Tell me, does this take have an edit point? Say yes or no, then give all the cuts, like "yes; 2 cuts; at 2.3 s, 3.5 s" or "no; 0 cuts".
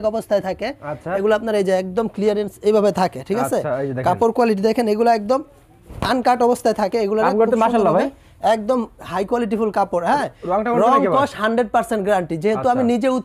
no; 0 cuts